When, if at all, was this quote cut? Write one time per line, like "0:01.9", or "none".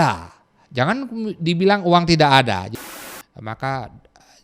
0:02.7